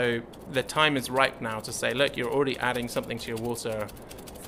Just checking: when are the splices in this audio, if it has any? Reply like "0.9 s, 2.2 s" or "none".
none